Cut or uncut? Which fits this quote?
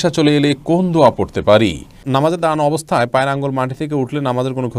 cut